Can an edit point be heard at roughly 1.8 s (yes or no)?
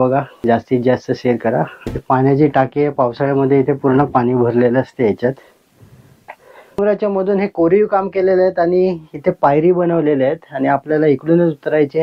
yes